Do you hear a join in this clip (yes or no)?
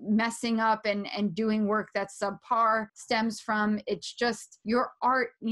yes